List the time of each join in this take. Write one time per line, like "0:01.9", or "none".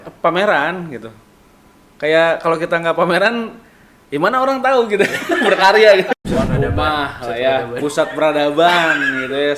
0:06.1